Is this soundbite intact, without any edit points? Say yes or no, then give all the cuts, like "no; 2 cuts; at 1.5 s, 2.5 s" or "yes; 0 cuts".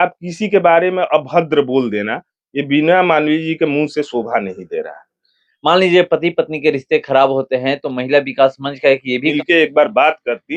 no; 1 cut; at 9.3 s